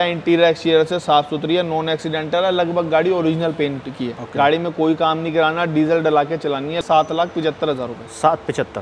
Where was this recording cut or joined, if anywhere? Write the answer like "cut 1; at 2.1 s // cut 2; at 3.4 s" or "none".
cut 1; at 4.1 s // cut 2; at 6.8 s